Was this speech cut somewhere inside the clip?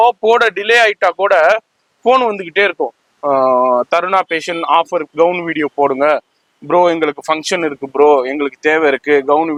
no; 0 cuts

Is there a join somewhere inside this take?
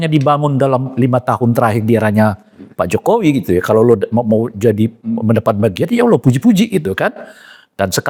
no; 0 cuts

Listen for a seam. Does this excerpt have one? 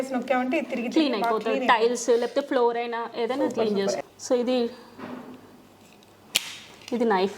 yes; 1 cut; at 4.0 s

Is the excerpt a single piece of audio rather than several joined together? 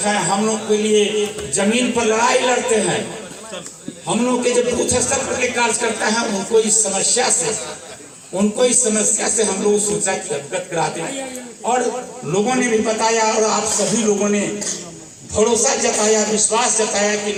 yes; 0 cuts

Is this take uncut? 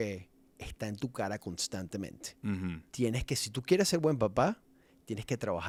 yes; 0 cuts

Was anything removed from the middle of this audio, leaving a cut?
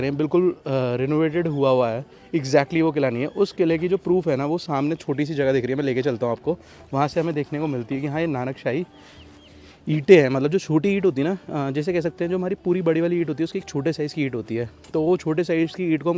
no; 0 cuts

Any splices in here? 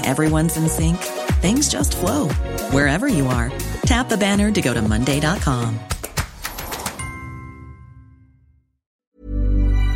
yes; 1 cut; at 9.0 s

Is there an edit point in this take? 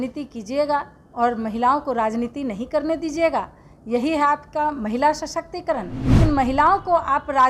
yes; 1 cut; at 6.2 s

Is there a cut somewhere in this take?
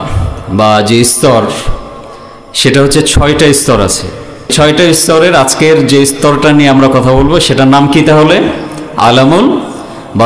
yes; 1 cut; at 4.5 s

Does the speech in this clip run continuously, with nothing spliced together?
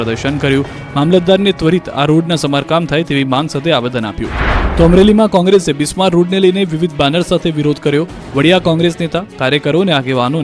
yes; 0 cuts

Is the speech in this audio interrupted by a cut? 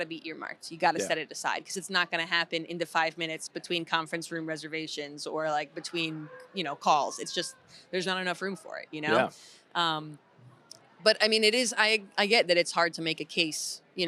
no; 0 cuts

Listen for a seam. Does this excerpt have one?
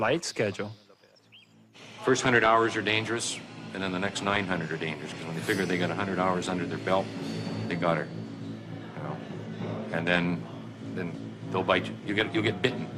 no; 0 cuts

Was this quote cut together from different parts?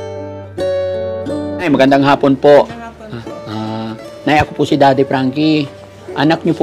yes; 1 cut; at 1.7 s

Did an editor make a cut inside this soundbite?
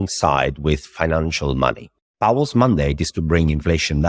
yes; 1 cut; at 1.9 s

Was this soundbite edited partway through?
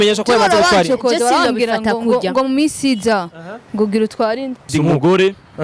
yes; 1 cut; at 4.7 s

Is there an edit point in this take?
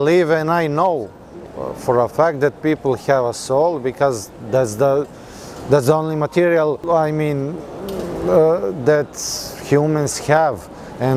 no; 0 cuts

